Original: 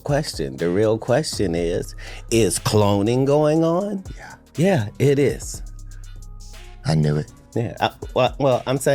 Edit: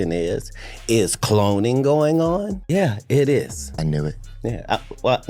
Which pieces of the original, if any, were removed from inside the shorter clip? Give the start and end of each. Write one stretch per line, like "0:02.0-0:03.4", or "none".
0:04.0-0:04.5
0:05.5-0:06.7